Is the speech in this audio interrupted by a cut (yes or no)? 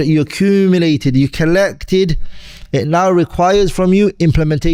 no